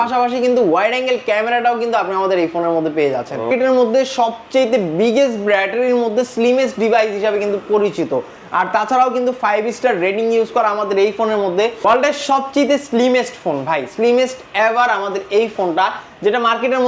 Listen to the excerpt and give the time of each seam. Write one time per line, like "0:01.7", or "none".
0:03.5
0:11.8